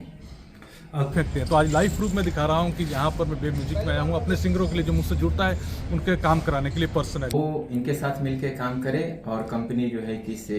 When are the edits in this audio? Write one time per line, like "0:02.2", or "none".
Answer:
0:01.1
0:07.3